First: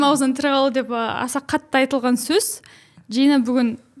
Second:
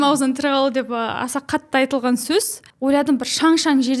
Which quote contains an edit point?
second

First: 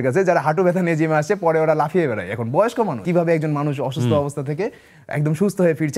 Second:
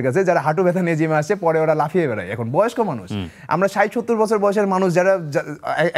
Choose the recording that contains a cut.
first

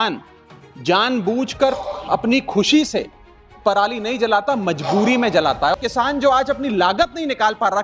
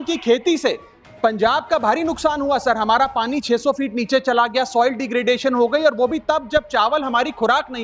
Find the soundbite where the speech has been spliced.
first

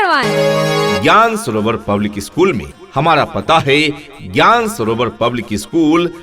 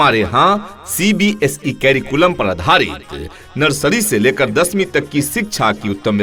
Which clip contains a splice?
first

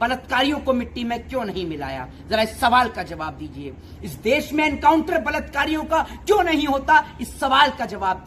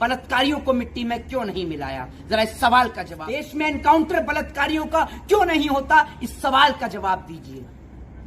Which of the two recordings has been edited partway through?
second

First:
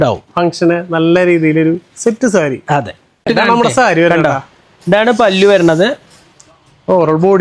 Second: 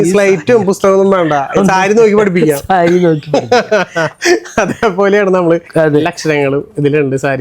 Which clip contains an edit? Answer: first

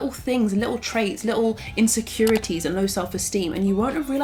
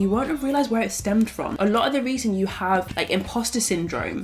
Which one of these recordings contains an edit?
second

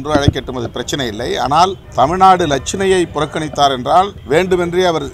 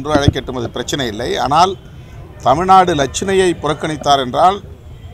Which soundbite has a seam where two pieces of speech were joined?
first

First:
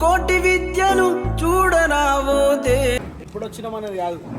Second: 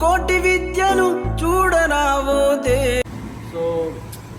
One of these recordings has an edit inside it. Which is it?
first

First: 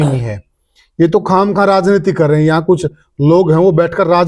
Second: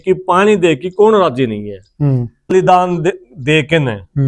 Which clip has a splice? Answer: second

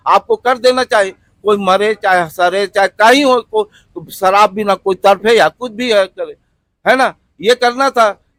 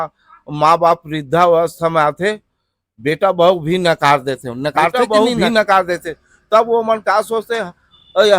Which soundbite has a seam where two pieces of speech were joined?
second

